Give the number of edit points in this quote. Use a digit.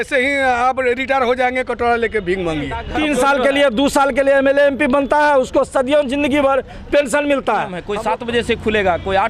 2